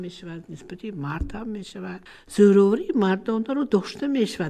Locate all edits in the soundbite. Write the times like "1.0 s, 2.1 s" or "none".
2.1 s